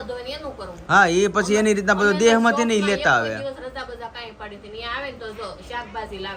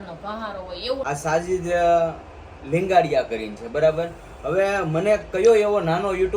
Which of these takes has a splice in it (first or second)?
second